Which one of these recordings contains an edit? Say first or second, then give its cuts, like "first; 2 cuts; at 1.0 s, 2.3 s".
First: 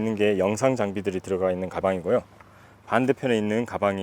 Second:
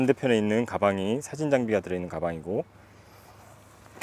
first; 1 cut; at 1.8 s